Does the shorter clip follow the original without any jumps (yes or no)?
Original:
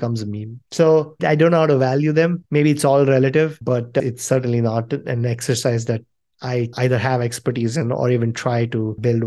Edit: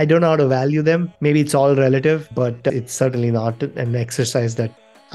yes